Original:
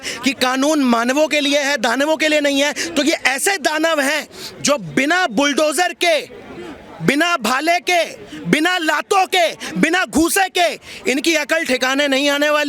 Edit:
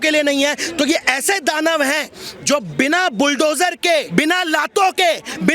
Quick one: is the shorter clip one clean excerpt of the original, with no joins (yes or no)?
no